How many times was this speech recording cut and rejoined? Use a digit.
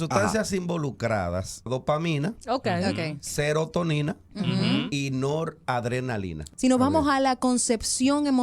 2